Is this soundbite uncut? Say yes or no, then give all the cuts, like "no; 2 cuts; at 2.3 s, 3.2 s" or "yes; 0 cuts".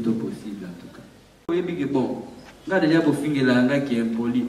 no; 1 cut; at 1.5 s